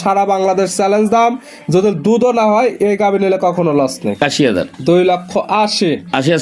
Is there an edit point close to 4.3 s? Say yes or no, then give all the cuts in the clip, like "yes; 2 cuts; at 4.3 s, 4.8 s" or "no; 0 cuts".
yes; 1 cut; at 4.3 s